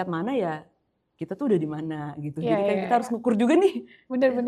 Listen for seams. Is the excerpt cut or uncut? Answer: uncut